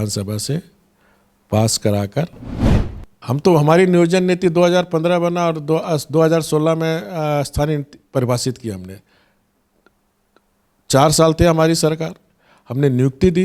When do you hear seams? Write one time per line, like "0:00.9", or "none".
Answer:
0:02.7